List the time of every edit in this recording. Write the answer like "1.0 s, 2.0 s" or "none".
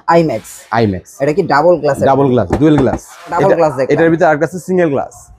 3.3 s